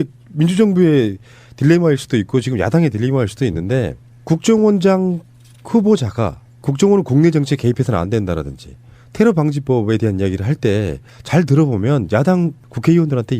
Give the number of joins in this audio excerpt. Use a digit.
1